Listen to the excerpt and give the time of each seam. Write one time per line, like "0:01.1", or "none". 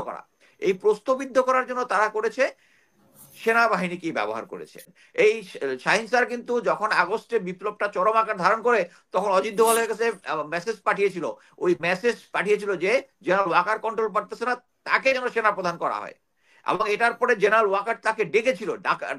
0:04.9